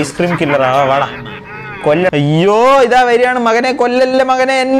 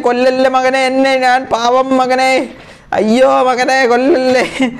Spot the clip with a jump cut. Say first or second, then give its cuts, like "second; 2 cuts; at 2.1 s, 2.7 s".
first; 1 cut; at 2.1 s